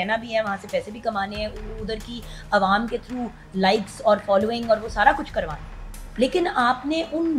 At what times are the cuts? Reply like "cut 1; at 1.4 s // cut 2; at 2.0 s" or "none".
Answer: none

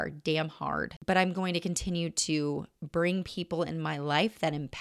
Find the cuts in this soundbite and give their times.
cut 1; at 0.9 s

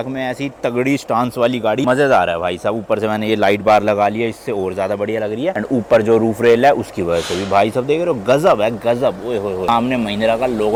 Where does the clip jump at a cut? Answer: none

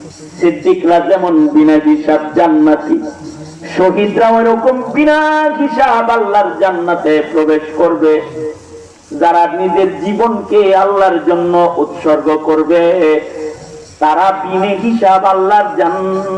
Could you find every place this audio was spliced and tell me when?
none

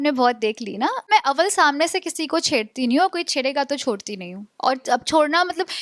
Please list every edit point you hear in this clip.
cut 1; at 1.1 s

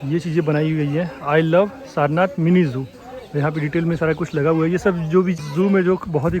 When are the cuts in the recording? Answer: cut 1; at 5.4 s

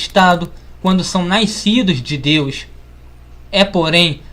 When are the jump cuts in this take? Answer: cut 1; at 2.8 s

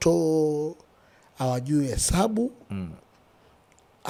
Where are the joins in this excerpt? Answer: none

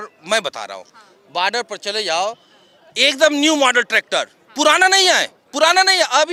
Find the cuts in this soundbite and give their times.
none

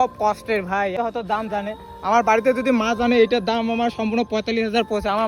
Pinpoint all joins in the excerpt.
cut 1; at 0.9 s

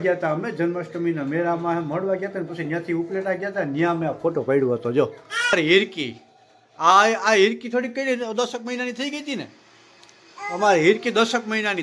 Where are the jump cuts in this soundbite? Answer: none

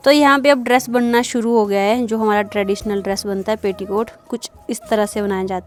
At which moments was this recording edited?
none

